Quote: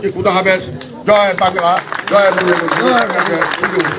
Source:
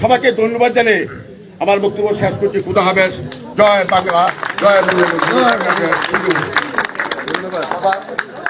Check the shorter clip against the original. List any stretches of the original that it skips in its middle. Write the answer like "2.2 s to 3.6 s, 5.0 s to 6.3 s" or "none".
none